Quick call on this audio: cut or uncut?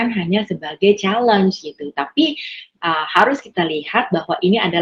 uncut